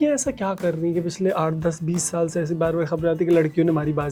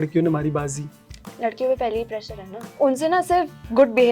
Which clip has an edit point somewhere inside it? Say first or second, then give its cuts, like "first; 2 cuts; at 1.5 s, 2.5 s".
second; 1 cut; at 2.8 s